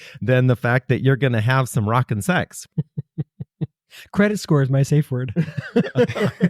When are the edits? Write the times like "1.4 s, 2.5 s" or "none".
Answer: 2.6 s